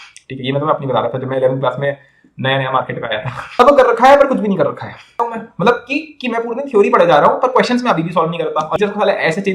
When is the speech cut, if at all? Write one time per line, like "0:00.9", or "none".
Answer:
0:03.6
0:05.2
0:08.8